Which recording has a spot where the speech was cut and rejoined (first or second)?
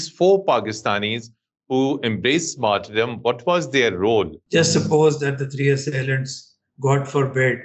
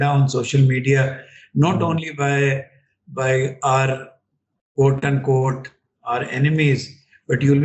first